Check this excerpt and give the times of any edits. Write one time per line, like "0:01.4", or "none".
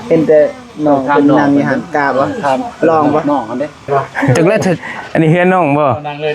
0:04.9